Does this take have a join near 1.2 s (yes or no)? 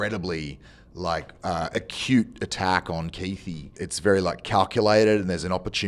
no